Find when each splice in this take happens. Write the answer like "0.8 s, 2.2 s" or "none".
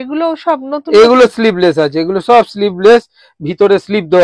none